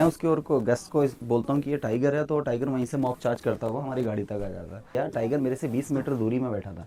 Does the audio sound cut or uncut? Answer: cut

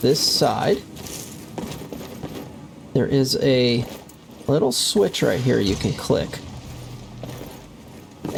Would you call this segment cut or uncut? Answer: uncut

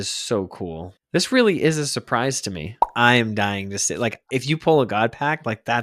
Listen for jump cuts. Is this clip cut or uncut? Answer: cut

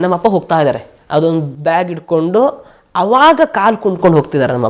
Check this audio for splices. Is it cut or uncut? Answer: cut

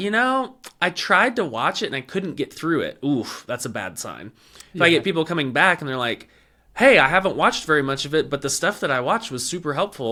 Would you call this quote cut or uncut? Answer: uncut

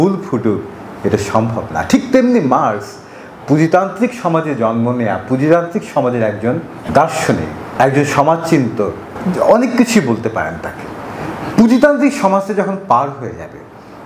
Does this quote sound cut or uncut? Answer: uncut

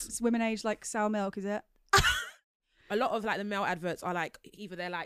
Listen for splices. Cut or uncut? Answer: cut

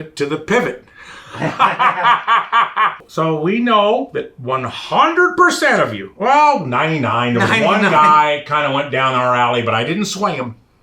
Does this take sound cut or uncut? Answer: cut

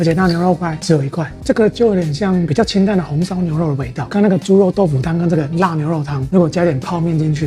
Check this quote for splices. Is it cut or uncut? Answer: uncut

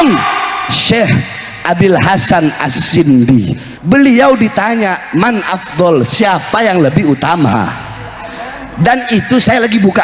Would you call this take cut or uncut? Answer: cut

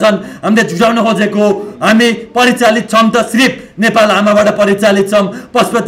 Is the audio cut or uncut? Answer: uncut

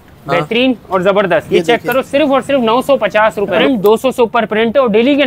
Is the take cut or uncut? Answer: cut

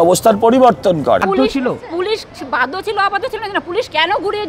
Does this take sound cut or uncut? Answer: cut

